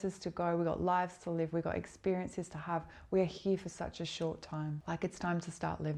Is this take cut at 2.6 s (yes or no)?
no